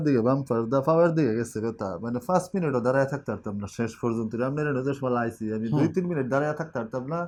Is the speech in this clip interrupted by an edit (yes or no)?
no